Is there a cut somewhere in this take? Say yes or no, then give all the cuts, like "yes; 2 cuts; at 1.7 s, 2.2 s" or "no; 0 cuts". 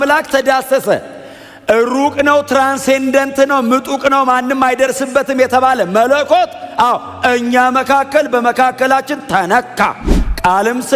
no; 0 cuts